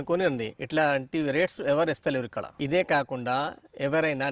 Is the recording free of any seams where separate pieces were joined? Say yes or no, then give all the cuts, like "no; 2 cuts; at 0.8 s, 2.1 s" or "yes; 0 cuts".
no; 1 cut; at 2.5 s